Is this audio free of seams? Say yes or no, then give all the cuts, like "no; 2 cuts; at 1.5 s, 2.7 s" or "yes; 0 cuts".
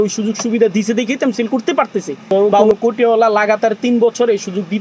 no; 1 cut; at 2.5 s